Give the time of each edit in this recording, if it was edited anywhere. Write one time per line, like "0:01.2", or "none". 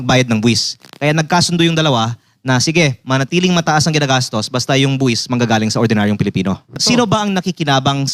0:06.8